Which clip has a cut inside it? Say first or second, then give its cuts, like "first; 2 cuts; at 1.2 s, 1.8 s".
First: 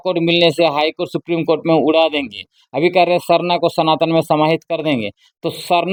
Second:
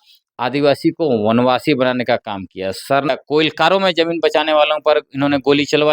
second; 1 cut; at 3.1 s